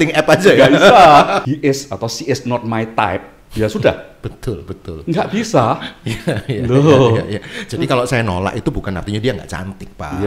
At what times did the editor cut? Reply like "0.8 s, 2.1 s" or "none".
1.4 s